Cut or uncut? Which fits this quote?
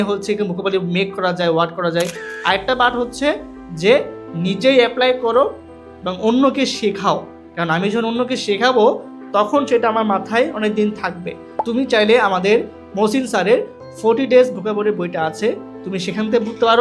cut